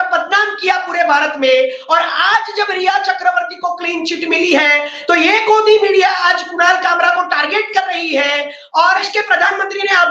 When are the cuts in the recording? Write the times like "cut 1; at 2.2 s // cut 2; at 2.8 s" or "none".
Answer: cut 1; at 8.9 s